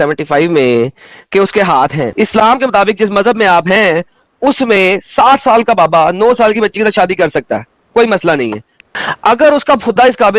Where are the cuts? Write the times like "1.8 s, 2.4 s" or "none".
2.1 s, 8.8 s